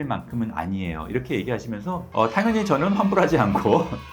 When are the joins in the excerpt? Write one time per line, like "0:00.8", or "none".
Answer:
0:02.0